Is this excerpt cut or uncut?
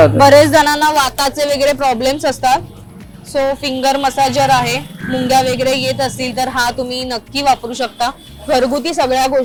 uncut